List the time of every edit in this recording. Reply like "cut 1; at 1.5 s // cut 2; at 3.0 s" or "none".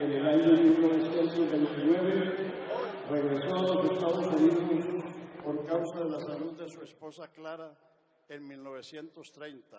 cut 1; at 4.9 s